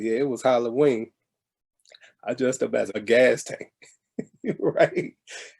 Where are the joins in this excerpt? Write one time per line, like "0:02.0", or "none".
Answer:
0:03.0